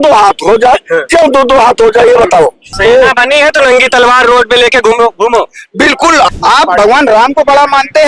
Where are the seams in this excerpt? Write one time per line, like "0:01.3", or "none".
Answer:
0:02.7
0:06.3